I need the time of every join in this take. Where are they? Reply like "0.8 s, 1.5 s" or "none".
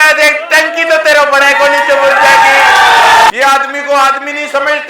3.3 s